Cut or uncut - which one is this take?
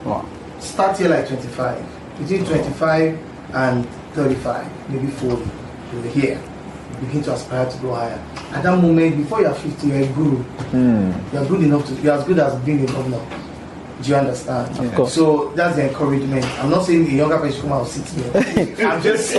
uncut